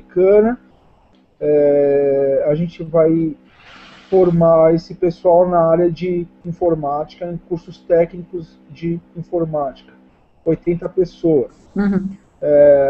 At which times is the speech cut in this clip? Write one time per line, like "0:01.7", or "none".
0:07.0